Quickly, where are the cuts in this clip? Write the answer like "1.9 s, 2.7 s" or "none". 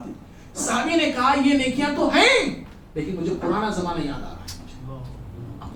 none